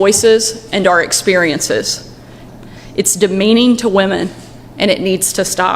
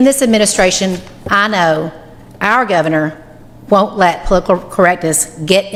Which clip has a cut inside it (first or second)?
first